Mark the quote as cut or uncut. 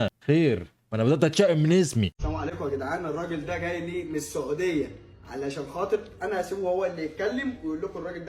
cut